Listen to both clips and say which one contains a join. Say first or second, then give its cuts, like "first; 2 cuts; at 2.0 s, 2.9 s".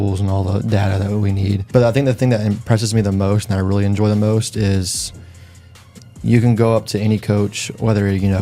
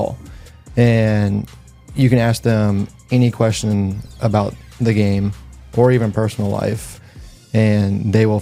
first; 1 cut; at 1.6 s